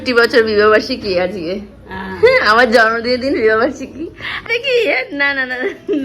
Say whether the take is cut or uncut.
cut